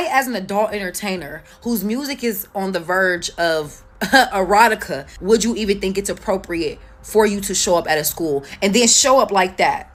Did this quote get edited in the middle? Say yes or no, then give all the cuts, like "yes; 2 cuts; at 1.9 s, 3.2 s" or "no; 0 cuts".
no; 0 cuts